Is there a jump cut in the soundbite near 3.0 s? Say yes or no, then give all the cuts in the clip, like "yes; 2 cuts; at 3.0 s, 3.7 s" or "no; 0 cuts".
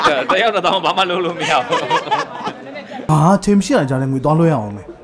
yes; 1 cut; at 3.0 s